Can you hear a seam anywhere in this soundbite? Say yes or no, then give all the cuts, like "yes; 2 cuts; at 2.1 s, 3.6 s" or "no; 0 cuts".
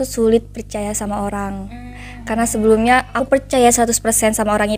yes; 1 cut; at 3.2 s